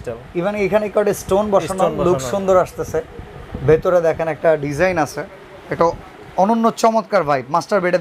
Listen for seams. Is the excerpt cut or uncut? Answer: uncut